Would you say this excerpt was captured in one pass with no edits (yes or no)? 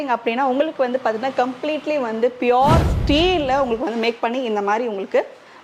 yes